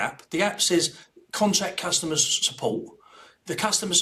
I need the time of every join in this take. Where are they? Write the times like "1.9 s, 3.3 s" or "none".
none

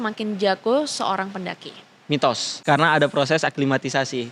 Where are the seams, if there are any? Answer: 2.5 s

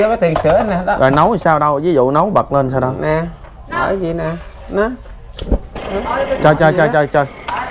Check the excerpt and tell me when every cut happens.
none

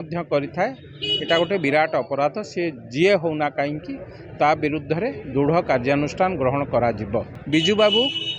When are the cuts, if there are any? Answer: 7.4 s

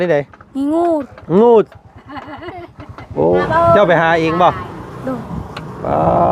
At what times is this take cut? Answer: 3.4 s

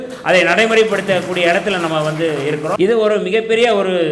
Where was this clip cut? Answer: 2.7 s

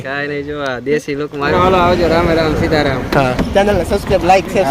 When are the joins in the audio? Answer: 1.4 s

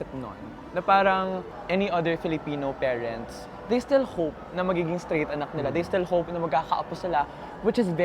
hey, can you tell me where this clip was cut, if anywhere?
1.5 s

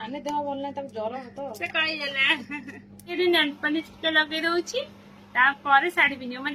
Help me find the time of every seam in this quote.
3.2 s

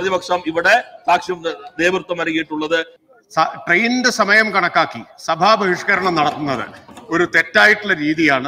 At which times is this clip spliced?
2.9 s

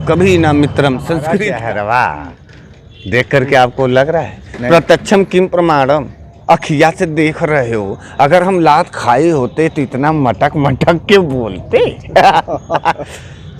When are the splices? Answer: 1.4 s

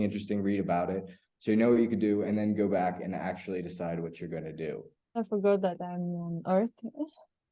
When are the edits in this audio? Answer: 5.2 s

